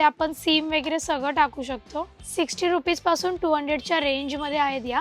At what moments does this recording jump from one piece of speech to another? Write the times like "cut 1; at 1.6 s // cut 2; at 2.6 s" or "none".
cut 1; at 2.2 s